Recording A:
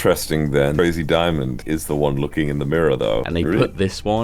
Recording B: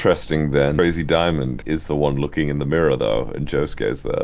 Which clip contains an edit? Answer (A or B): A